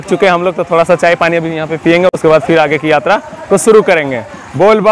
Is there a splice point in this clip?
no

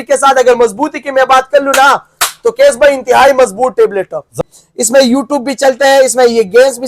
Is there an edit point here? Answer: yes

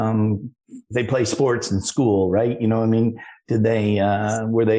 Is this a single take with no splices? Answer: yes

